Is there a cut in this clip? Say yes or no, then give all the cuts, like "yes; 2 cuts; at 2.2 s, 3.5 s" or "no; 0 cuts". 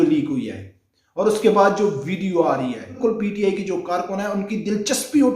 yes; 1 cut; at 3.0 s